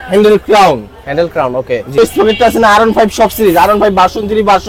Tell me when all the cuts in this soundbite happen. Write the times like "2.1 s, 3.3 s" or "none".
1.9 s